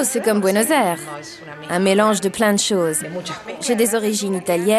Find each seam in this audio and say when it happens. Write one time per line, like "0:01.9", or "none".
0:03.4